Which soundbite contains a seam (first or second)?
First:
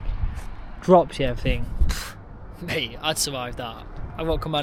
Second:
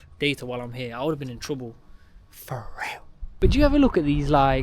second